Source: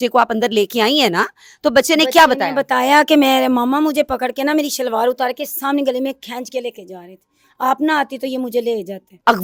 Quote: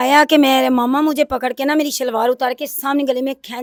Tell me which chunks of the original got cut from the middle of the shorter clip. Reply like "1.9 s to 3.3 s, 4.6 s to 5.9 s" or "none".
none